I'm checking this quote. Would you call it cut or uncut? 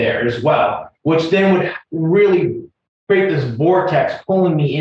uncut